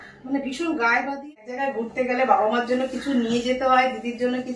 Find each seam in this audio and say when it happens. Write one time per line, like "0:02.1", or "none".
0:01.5